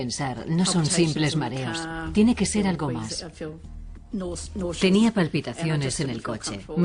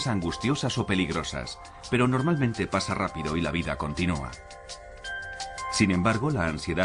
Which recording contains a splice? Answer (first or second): first